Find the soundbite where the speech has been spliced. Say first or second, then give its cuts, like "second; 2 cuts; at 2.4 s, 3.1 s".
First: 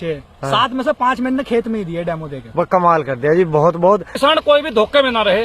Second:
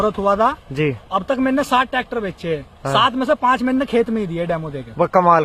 first; 1 cut; at 4.1 s